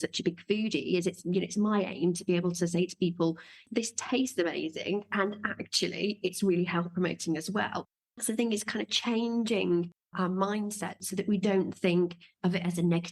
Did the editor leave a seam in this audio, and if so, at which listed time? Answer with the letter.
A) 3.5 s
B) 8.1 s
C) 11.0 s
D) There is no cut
C